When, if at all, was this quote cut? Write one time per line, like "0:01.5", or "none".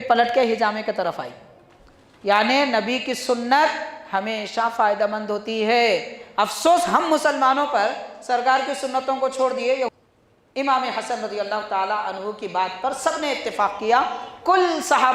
0:09.9